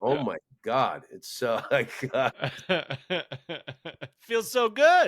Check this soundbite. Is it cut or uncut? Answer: cut